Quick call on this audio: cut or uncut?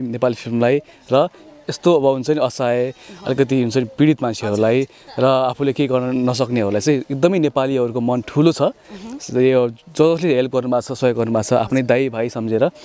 uncut